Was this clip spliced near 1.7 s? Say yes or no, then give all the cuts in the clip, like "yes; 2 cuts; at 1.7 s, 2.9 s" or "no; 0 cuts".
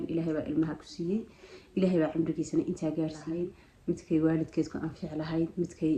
no; 1 cut; at 3.3 s